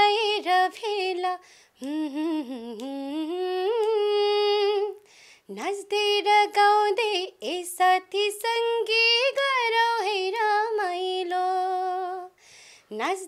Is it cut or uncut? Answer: uncut